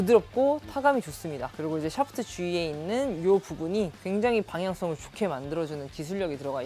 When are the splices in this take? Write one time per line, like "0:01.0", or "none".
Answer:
none